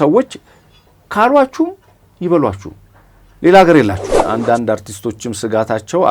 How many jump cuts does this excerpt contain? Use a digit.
1